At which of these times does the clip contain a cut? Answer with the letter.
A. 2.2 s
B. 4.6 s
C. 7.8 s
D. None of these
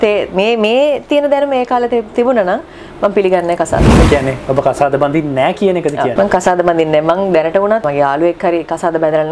C